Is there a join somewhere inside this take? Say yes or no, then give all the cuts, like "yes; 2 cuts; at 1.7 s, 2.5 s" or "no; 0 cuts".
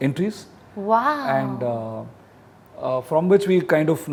no; 0 cuts